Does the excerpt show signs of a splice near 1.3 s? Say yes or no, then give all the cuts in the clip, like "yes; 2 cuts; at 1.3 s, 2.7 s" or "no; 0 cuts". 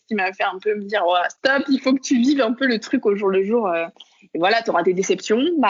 yes; 1 cut; at 1.3 s